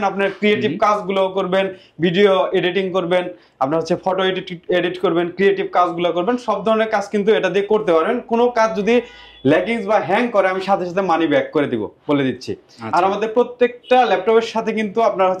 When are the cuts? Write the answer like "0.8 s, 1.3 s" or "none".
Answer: none